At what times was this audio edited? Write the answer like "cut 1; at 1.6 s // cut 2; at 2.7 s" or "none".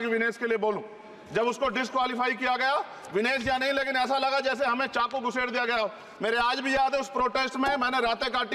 none

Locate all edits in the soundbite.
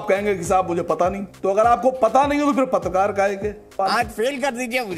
cut 1; at 1.3 s // cut 2; at 3.8 s

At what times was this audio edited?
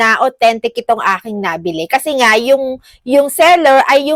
none

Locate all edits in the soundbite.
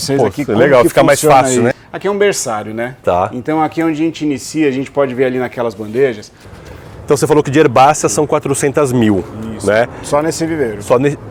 cut 1; at 1.8 s // cut 2; at 6.7 s

